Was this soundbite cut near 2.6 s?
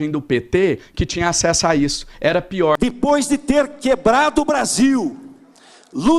yes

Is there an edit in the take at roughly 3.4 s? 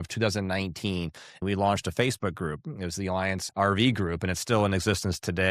yes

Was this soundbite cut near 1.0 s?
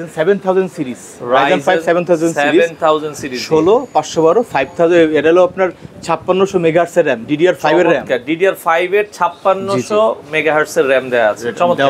no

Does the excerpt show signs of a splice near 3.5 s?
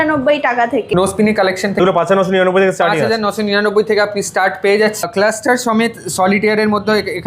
no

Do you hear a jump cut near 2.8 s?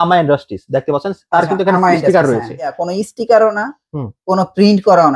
yes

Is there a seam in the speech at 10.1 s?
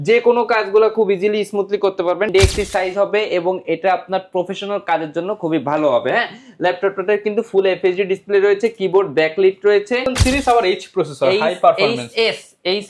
yes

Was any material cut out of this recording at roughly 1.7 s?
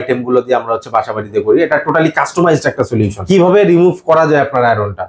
no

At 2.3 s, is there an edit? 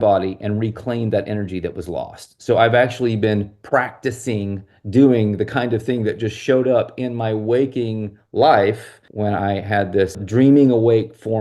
no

